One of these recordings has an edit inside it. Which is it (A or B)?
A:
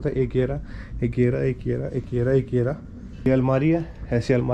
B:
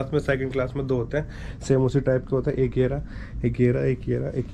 A